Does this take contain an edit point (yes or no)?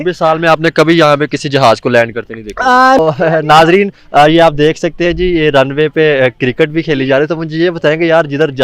yes